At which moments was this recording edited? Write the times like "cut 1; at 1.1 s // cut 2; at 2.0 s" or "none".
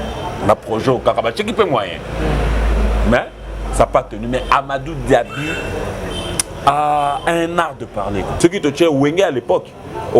cut 1; at 8.3 s

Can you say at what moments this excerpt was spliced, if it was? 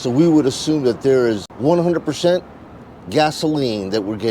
cut 1; at 1.5 s

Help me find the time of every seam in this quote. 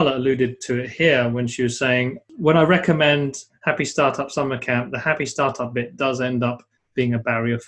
cut 1; at 2.2 s

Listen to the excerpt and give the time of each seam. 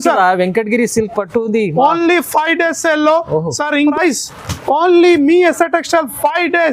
cut 1; at 3.9 s

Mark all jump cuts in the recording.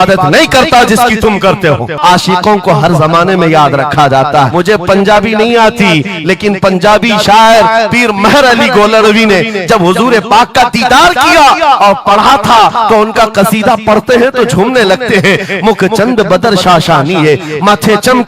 cut 1; at 2.0 s // cut 2; at 4.5 s

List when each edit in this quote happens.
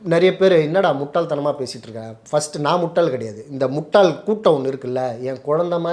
none

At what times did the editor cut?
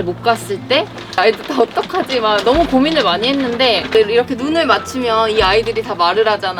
cut 1; at 1.2 s // cut 2; at 3.9 s

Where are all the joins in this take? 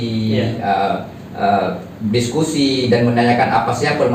none

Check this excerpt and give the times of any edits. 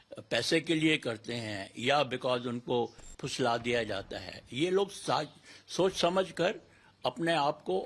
none

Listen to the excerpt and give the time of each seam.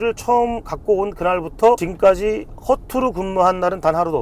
cut 1; at 1.9 s

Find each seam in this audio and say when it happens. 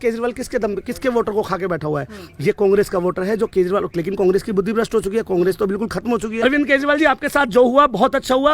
cut 1; at 6.4 s

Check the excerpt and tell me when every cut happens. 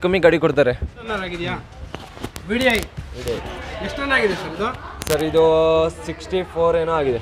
cut 1; at 1.1 s

